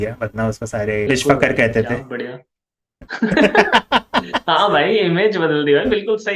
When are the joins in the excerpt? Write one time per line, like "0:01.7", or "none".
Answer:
0:01.1